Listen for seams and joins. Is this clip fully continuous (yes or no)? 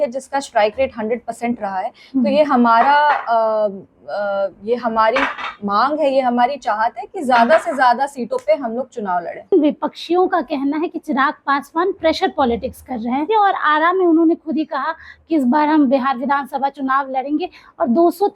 no